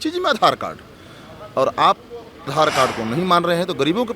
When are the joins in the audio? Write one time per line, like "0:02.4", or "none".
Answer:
0:02.5